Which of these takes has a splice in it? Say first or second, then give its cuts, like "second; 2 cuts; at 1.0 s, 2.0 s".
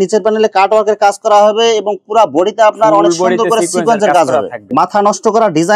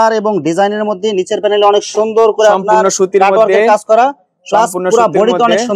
first; 1 cut; at 4.6 s